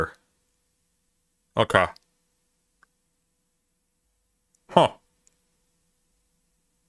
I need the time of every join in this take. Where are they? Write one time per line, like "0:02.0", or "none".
none

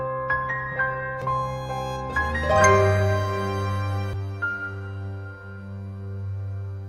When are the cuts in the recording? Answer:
0:01.1

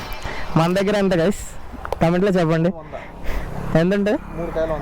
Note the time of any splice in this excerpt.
none

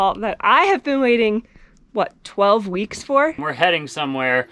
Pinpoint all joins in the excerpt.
0:03.4

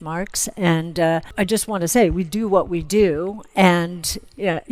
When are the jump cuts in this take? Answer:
0:01.3

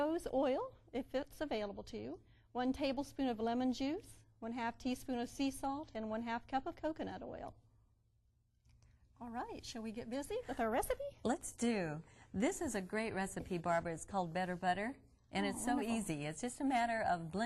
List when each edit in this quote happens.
0:16.1

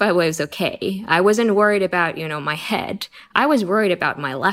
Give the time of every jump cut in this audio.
none

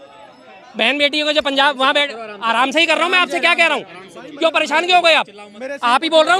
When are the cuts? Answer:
none

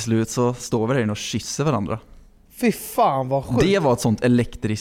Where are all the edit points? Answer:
none

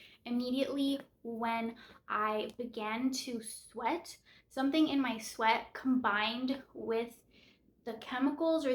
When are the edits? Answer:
none

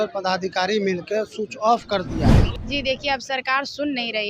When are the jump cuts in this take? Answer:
0:02.5

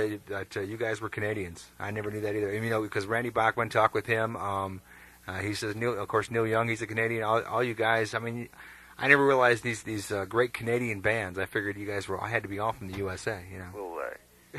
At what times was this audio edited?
none

